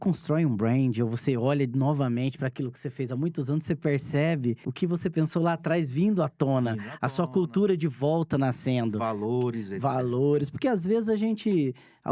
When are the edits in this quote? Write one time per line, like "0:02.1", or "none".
0:04.7